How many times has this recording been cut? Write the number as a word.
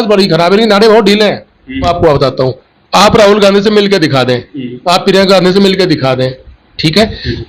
one